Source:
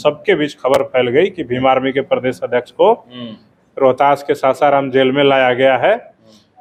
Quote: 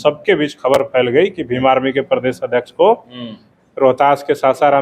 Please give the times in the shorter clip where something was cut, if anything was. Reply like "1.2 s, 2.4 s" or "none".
none